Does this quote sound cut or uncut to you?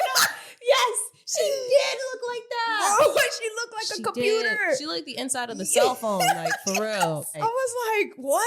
cut